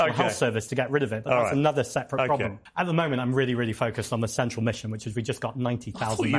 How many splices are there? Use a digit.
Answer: 1